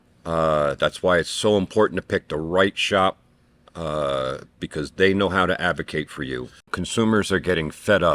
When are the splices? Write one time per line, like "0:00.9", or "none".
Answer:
0:06.8